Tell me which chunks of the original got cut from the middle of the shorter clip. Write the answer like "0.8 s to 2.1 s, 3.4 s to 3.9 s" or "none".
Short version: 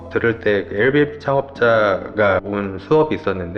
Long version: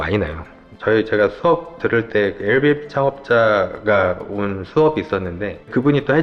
4.1 s to 4.3 s